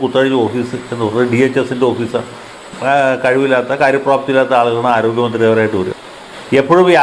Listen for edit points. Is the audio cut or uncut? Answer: cut